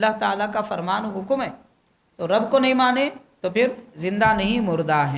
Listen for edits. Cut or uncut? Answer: uncut